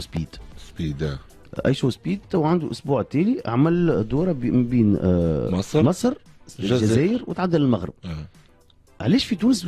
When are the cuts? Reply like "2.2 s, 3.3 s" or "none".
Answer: none